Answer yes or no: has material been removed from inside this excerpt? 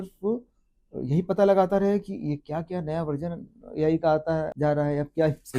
yes